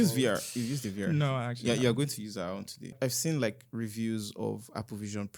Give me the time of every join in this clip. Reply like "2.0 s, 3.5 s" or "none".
2.9 s